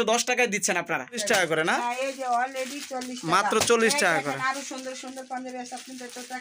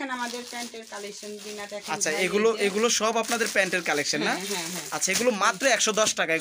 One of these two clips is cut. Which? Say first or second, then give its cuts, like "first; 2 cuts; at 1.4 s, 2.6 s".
first; 1 cut; at 1.2 s